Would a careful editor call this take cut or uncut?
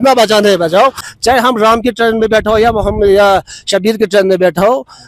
cut